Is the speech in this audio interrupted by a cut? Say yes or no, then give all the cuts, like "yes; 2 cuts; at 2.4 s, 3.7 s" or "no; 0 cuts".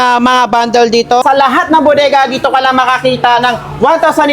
yes; 1 cut; at 1.2 s